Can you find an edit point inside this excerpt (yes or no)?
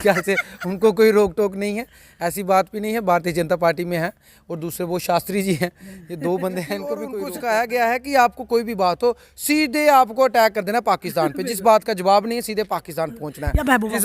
yes